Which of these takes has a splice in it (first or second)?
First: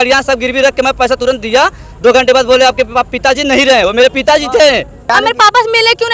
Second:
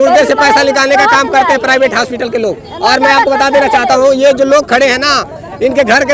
first